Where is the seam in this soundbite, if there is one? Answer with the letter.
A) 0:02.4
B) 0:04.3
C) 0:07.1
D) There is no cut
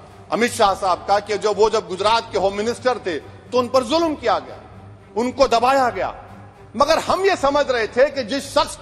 D